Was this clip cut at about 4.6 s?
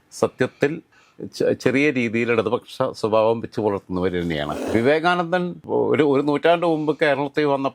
yes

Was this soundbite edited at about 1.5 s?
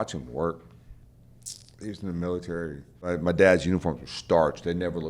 no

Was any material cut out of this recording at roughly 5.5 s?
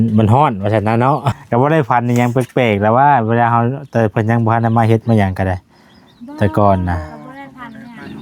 no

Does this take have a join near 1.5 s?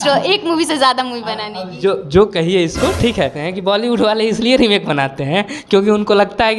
no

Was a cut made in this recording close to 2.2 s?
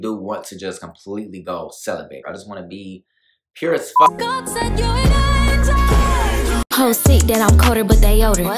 yes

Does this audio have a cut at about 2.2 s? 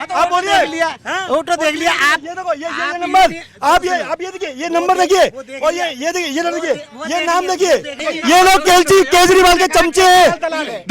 no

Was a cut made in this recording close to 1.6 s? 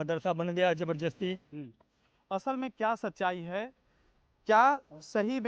yes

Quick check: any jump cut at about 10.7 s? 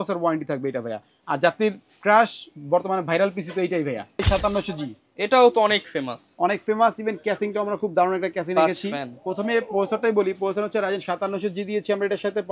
no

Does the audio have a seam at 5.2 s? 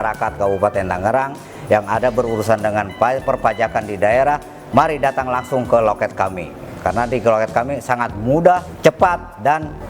no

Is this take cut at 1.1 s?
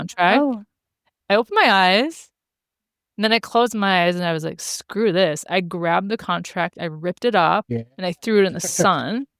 yes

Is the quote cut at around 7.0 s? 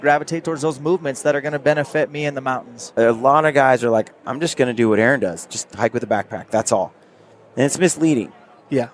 no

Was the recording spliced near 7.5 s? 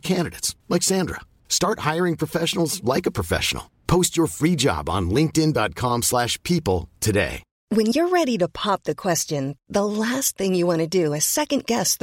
yes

